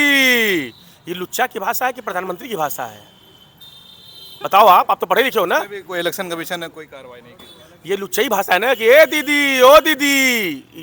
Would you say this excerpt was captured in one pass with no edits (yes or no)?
yes